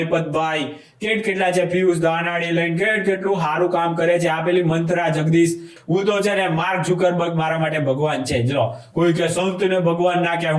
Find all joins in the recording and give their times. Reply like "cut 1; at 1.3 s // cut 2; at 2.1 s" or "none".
cut 1; at 5.7 s